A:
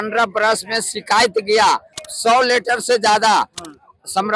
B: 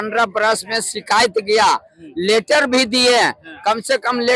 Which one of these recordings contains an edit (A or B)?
A